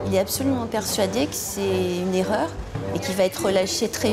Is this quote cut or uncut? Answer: uncut